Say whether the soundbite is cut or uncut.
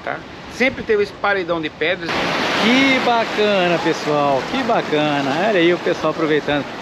cut